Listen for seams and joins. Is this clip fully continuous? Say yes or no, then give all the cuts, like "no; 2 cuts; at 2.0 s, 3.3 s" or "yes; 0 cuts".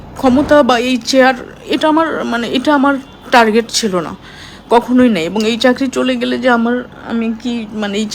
yes; 0 cuts